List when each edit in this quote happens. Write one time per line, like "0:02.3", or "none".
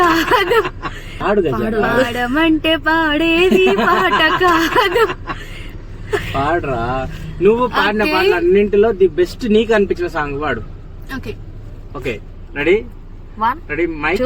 0:01.1